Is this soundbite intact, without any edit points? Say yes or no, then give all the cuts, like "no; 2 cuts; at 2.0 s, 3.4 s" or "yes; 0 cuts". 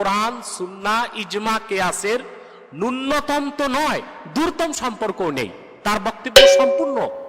yes; 0 cuts